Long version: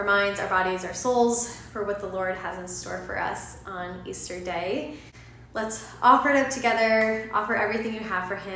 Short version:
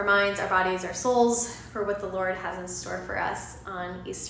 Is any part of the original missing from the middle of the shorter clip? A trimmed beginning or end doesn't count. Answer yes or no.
no